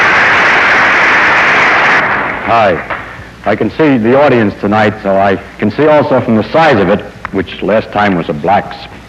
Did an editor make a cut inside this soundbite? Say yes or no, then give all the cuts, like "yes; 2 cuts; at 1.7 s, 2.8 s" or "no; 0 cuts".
no; 0 cuts